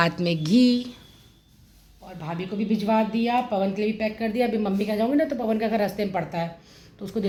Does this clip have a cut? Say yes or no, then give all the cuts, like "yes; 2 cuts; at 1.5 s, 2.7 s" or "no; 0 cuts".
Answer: no; 0 cuts